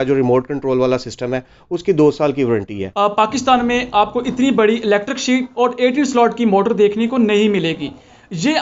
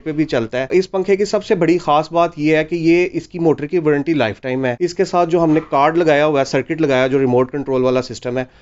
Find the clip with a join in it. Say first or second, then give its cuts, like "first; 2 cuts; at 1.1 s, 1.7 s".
first; 1 cut; at 2.8 s